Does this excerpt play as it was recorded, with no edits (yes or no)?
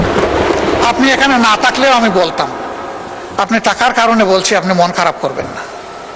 yes